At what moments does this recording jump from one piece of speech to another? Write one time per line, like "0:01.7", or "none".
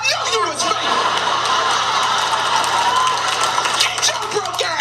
none